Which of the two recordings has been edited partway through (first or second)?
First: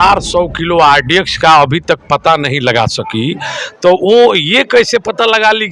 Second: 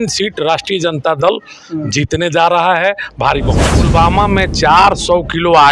second